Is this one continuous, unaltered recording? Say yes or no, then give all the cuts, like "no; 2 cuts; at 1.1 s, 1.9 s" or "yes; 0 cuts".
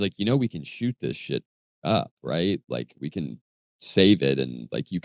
yes; 0 cuts